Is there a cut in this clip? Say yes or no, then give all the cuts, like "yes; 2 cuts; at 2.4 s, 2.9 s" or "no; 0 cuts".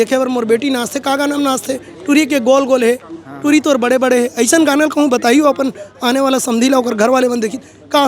no; 0 cuts